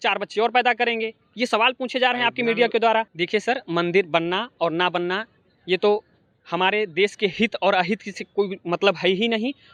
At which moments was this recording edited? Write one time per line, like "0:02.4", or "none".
none